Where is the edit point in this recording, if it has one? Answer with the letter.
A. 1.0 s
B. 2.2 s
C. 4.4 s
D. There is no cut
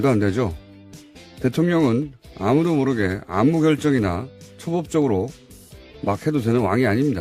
B